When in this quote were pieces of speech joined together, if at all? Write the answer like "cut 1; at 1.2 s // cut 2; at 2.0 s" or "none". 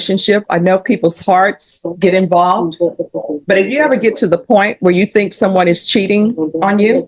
none